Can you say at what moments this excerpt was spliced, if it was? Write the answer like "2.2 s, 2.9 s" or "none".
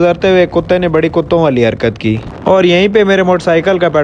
none